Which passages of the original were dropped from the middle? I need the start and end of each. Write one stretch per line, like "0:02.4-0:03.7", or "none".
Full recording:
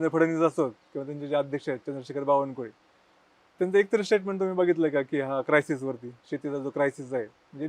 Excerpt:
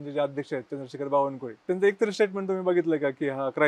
0:02.6-0:03.4

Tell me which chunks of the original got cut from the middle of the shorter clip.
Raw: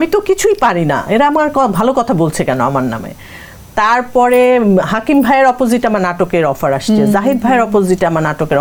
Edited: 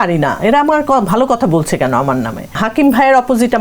0:03.3-0:04.9

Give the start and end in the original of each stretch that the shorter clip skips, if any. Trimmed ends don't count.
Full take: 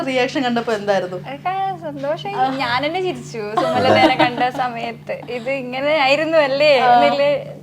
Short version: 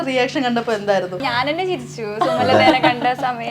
0:01.2-0:02.6

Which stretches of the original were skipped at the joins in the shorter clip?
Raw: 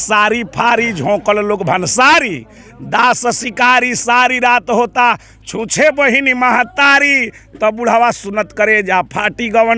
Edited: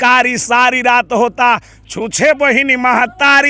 none

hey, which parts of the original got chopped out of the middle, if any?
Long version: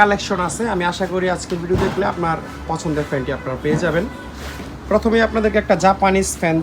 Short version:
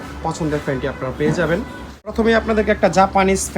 0:04.6-0:05.0

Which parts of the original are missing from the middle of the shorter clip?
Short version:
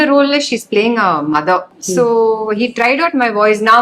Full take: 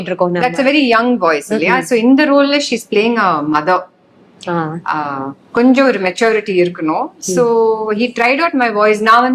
0:04.0-0:07.2

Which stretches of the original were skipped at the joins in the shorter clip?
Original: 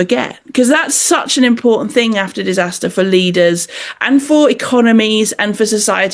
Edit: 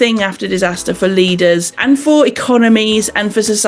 0:03.7-0:03.9

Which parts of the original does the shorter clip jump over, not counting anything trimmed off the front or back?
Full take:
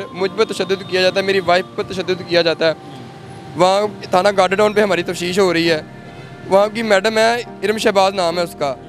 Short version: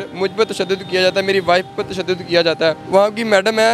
0:02.8-0:06.4

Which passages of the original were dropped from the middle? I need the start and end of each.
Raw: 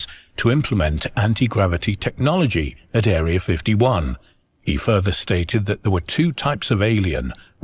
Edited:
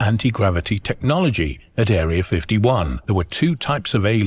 0:04.2-0:05.8

